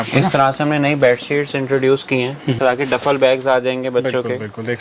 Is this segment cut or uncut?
cut